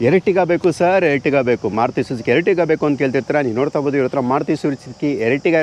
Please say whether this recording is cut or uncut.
uncut